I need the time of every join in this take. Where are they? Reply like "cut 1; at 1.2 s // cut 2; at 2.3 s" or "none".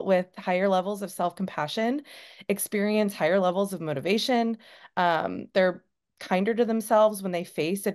none